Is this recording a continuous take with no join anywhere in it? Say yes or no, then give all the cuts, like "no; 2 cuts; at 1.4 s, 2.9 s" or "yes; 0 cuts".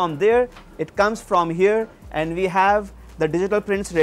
yes; 0 cuts